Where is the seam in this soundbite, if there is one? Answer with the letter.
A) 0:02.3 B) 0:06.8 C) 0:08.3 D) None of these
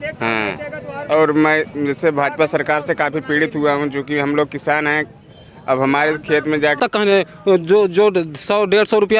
B